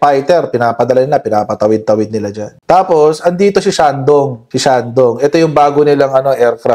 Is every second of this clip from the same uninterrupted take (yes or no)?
yes